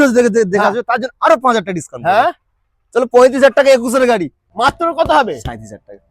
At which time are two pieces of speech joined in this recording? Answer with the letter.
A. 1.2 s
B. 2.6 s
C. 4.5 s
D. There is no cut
C